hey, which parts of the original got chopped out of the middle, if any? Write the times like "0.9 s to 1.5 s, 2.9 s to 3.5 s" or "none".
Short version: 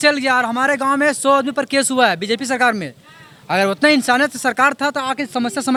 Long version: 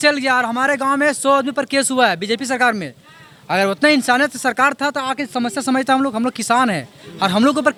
none